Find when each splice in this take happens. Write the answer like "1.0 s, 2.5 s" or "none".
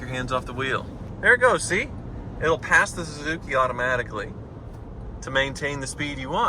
1.0 s

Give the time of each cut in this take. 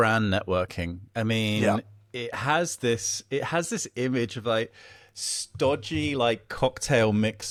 none

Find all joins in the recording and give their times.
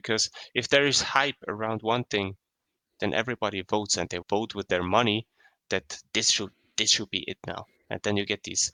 none

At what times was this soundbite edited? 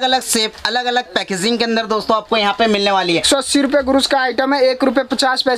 3.2 s

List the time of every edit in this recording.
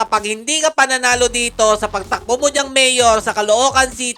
none

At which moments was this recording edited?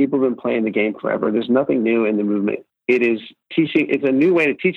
2.7 s, 3.4 s

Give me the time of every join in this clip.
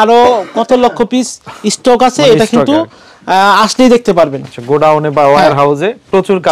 none

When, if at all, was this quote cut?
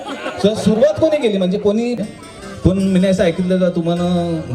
2.0 s

